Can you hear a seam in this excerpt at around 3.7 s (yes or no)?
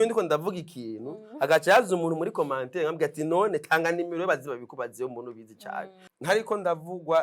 no